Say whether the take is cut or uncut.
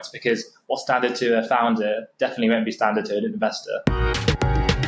cut